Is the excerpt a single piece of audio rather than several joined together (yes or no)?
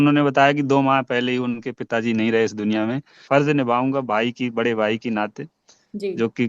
no